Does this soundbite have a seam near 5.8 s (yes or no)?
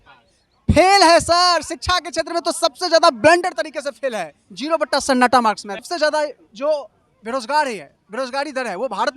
yes